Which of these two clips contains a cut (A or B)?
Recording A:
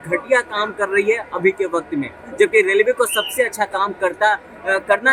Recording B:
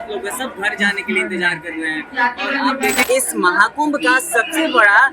B